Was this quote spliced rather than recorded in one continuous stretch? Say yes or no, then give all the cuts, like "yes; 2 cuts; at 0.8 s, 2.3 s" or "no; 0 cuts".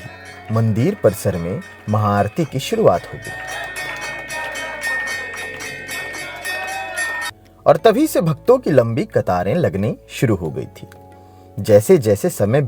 no; 0 cuts